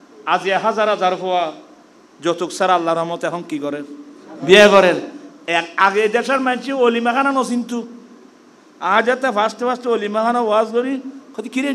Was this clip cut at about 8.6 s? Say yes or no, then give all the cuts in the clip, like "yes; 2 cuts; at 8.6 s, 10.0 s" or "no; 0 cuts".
no; 0 cuts